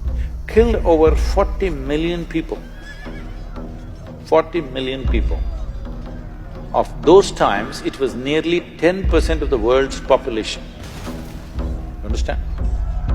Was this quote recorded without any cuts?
yes; 0 cuts

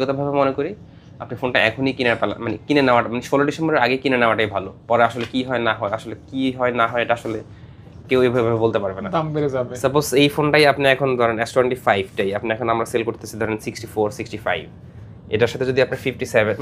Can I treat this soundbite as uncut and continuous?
yes; 0 cuts

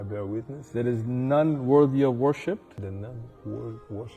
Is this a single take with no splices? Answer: yes; 0 cuts

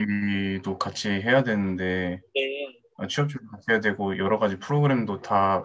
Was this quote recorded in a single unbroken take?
yes; 0 cuts

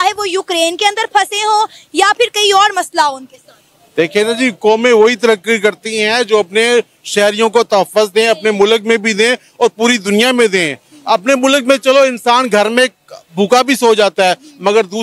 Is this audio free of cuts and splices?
yes; 0 cuts

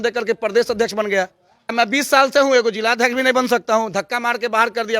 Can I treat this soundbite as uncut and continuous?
no; 1 cut; at 1.7 s

